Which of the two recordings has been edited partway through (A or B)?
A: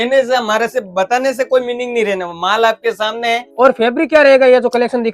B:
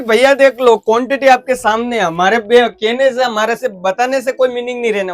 A